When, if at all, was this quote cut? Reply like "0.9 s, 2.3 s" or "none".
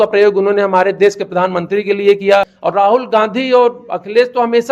2.6 s